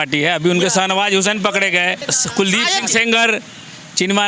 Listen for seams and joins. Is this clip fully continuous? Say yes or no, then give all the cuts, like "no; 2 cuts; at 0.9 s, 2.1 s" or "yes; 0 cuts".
no; 1 cut; at 2.0 s